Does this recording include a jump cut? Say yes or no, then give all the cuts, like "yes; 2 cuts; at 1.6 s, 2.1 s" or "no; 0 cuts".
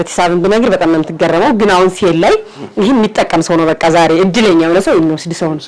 no; 0 cuts